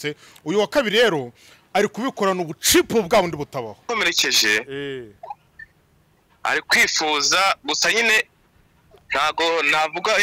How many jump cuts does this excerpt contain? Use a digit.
1